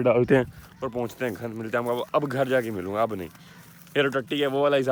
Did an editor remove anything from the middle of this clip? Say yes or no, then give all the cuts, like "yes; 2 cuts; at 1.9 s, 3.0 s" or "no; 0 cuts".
no; 0 cuts